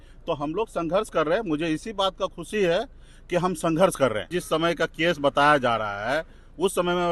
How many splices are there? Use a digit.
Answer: 1